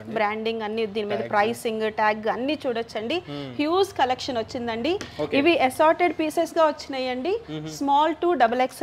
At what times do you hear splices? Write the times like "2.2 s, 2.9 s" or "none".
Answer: none